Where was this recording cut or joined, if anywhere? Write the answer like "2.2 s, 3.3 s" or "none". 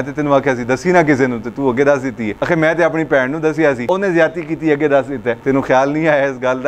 2.3 s, 3.9 s, 5.4 s